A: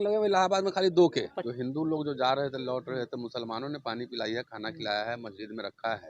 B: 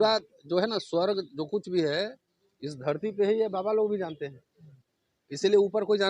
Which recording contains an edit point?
A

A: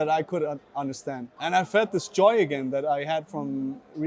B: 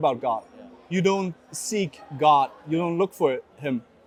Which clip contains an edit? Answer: A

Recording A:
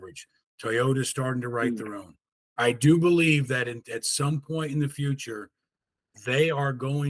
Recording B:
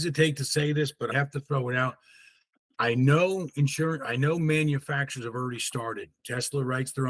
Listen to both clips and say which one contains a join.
B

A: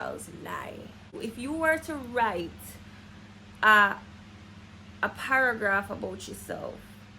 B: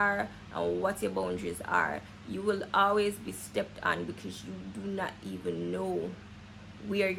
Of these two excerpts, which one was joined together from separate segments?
A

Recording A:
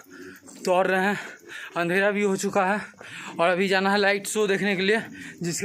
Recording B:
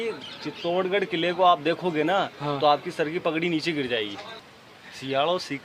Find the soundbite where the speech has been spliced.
B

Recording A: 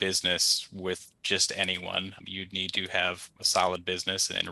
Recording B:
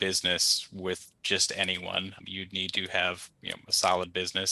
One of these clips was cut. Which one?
A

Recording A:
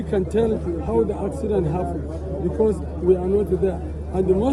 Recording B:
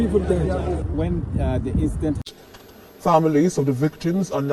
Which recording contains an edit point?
B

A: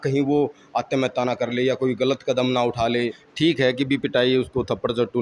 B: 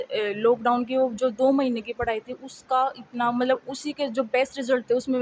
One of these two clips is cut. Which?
A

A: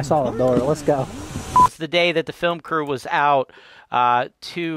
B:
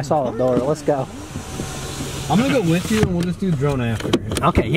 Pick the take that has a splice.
A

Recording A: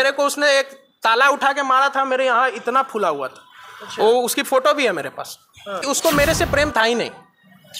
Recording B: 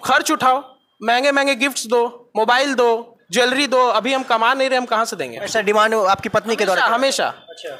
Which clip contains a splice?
A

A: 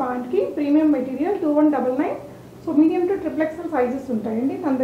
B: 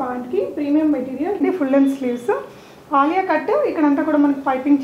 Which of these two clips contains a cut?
B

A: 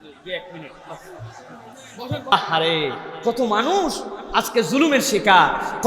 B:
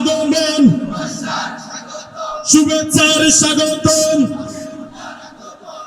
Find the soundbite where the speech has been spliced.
A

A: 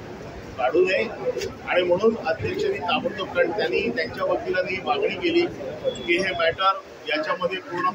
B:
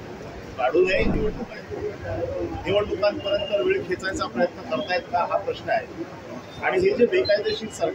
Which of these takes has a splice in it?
B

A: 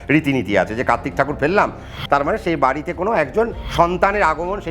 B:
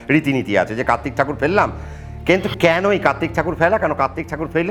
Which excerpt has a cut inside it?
A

